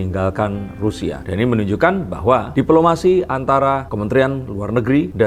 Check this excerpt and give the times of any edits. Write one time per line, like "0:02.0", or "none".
none